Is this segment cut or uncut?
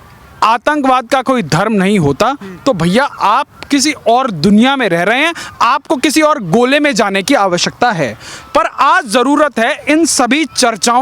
uncut